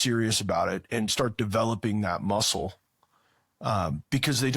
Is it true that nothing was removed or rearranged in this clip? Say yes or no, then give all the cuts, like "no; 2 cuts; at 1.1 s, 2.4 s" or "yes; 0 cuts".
yes; 0 cuts